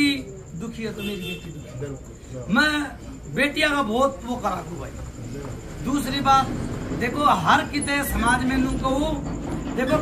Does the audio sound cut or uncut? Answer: uncut